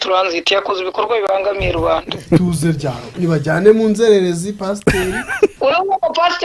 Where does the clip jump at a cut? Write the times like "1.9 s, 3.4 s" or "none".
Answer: 2.3 s, 5.5 s